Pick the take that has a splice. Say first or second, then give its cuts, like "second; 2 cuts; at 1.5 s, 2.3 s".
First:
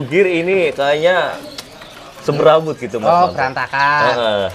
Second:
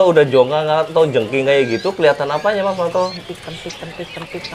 second; 1 cut; at 3.2 s